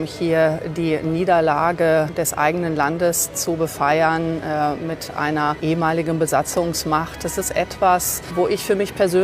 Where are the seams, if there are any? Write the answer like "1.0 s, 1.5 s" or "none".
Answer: 2.1 s, 5.6 s, 8.2 s